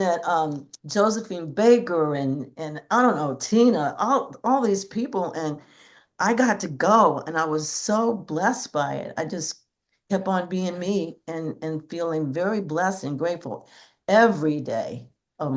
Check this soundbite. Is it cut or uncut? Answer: uncut